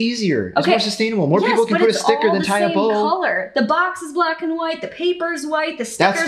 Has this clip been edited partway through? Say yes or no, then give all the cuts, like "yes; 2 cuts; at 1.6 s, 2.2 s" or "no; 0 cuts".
no; 0 cuts